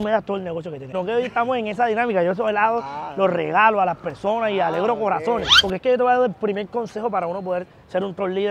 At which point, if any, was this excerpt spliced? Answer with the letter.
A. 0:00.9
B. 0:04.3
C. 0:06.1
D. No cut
A